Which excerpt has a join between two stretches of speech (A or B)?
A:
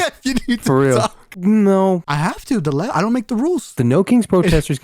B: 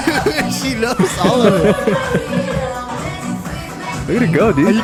A